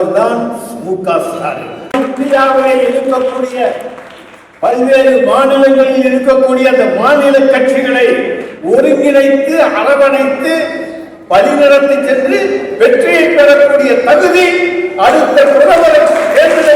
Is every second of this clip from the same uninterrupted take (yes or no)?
no